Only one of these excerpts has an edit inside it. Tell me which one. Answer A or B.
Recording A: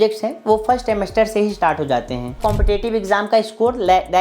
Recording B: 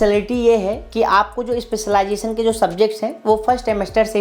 A